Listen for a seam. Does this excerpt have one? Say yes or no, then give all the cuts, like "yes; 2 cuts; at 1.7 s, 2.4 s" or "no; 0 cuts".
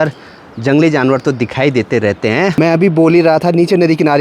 yes; 1 cut; at 2.5 s